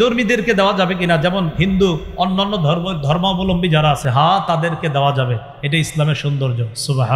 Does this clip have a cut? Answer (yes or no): no